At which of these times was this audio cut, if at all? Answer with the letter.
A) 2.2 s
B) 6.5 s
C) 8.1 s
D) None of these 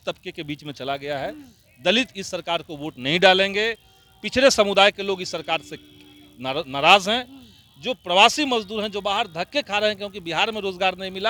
D